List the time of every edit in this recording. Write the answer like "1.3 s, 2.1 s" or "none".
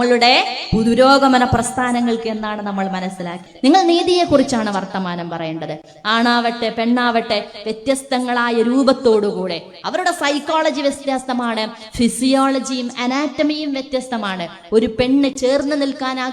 3.5 s